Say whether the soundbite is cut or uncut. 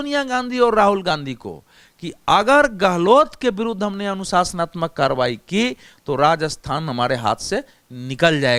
uncut